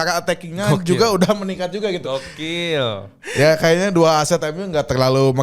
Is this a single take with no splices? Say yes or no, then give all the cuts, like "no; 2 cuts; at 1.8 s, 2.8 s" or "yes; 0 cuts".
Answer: no; 1 cut; at 3.1 s